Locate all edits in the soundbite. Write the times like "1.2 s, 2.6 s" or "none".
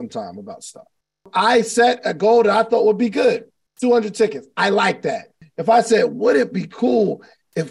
1.3 s, 5.3 s